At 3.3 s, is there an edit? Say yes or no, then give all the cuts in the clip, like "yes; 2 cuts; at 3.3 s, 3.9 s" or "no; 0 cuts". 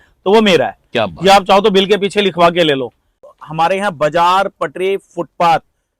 yes; 1 cut; at 3.3 s